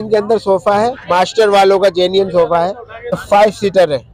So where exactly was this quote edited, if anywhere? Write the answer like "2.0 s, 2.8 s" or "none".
3.2 s